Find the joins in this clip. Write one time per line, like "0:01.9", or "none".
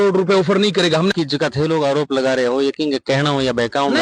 0:01.1